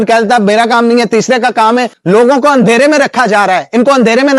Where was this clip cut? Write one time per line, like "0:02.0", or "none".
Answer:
0:01.9